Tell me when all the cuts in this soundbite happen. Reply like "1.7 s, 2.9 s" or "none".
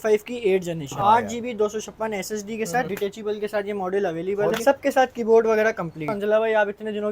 0.9 s, 2.9 s, 4.6 s, 6.1 s